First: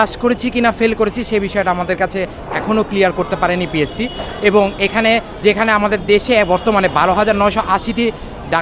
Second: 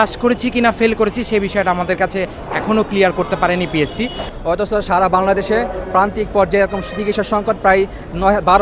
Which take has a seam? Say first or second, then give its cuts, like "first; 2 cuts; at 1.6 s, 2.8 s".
second; 1 cut; at 4.3 s